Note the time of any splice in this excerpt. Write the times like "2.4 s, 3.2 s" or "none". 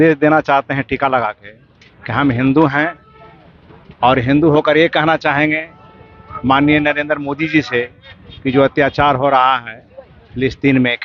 none